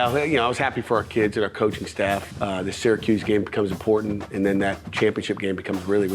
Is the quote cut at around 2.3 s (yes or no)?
yes